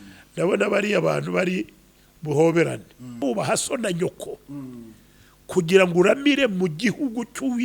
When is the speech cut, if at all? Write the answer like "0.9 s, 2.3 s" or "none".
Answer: 3.2 s